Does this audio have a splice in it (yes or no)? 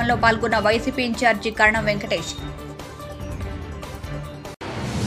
no